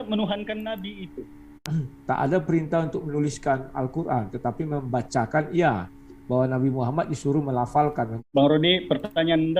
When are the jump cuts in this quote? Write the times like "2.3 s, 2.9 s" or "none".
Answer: 1.6 s, 8.2 s